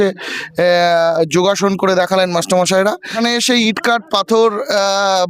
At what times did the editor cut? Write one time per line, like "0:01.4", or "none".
0:03.1